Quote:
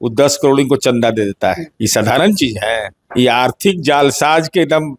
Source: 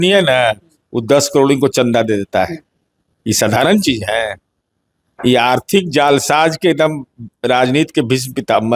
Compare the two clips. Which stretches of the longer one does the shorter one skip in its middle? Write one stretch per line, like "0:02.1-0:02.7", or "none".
0:02.6-0:03.2
0:04.4-0:05.0